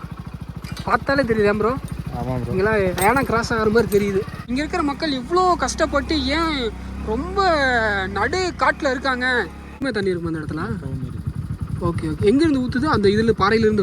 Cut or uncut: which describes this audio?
cut